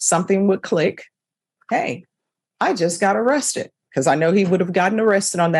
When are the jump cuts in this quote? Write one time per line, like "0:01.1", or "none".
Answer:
none